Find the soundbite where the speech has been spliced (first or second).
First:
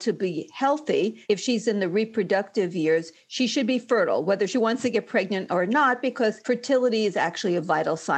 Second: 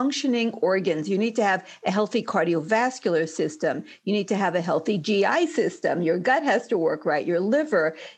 first